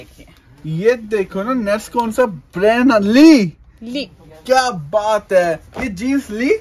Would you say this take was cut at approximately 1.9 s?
no; 0 cuts

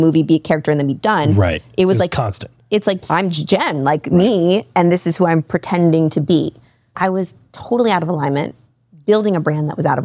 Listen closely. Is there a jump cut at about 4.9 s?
no; 1 cut; at 3.0 s

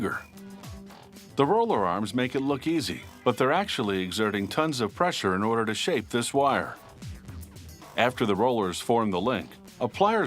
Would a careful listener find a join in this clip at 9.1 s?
yes; 1 cut; at 9.1 s

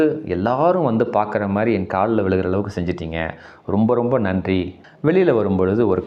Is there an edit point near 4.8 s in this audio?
yes; 1 cut; at 4.8 s

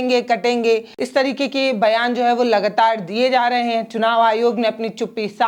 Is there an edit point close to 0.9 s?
yes; 1 cut; at 0.9 s

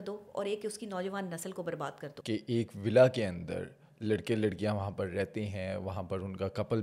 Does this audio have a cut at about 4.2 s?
no; 1 cut; at 2.1 s

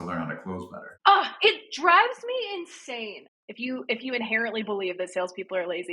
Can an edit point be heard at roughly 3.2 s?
yes; 1 cut; at 3.2 s

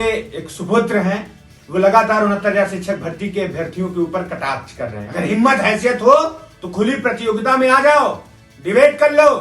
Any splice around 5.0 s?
yes; 1 cut; at 5.0 s

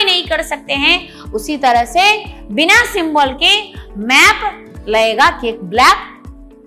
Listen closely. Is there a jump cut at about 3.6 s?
no; 0 cuts

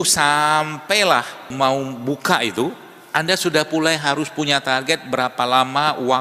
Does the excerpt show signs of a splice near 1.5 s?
yes; 1 cut; at 1.5 s

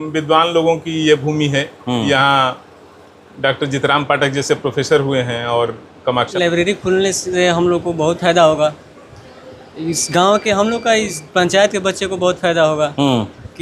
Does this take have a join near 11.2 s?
no; 1 cut; at 6.3 s

